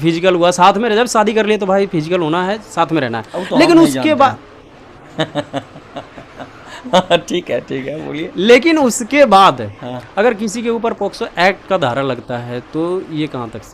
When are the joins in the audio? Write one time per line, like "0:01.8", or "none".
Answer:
none